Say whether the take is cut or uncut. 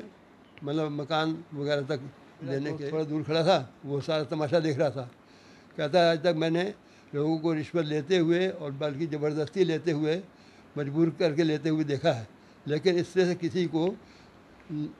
cut